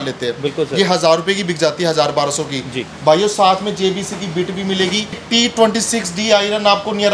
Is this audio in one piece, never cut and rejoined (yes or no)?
no